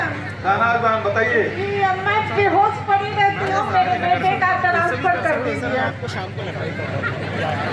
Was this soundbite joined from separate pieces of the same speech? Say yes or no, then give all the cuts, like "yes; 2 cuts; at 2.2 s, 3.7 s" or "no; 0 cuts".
no; 0 cuts